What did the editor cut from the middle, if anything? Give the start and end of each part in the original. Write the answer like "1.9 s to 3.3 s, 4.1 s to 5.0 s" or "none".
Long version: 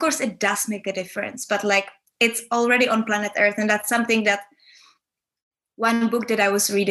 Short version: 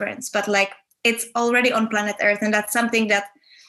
none